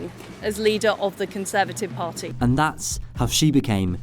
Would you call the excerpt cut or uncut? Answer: uncut